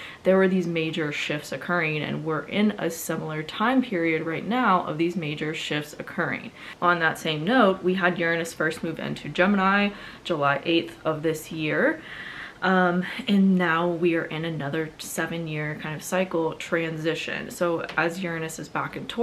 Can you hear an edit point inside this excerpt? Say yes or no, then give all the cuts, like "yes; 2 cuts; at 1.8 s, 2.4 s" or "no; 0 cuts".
no; 0 cuts